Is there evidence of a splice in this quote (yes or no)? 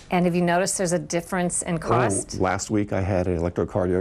yes